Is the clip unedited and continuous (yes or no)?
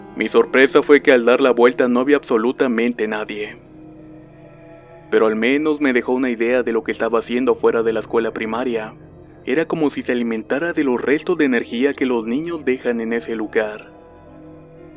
yes